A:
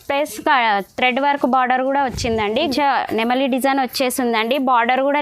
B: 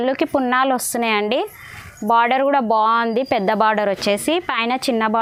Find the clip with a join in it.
A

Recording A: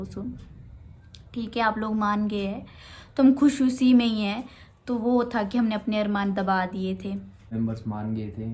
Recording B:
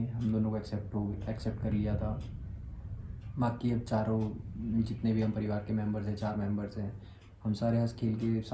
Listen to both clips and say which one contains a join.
A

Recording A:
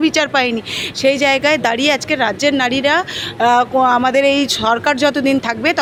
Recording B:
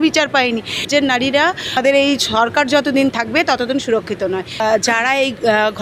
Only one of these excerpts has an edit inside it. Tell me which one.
B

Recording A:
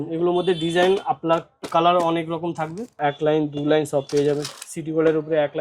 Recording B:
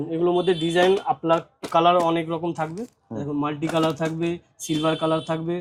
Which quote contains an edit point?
A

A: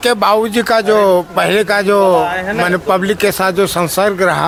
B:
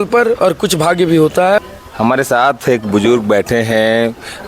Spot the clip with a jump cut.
B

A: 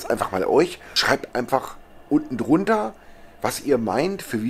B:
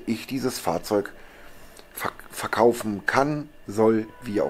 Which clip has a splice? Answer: A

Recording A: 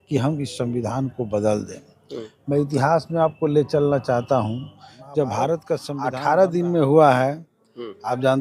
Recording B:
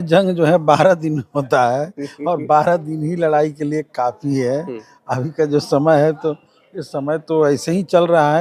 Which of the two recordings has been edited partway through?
A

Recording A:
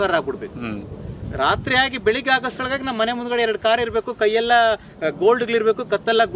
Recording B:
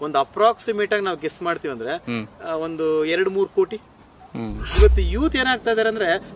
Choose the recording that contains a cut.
B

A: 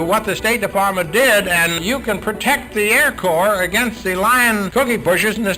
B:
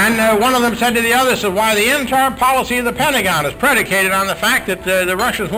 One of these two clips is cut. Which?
A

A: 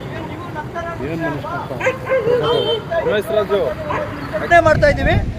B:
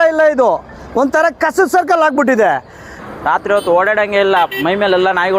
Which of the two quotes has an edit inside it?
B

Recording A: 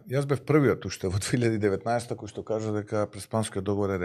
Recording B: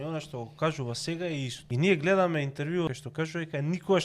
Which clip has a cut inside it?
B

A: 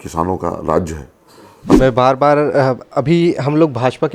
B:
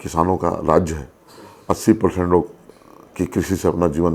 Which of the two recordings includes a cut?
A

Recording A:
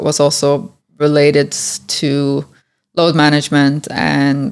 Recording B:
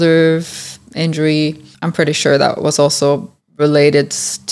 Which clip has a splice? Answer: B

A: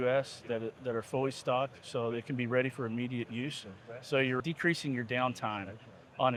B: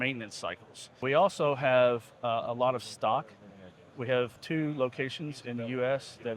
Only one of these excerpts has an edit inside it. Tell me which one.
B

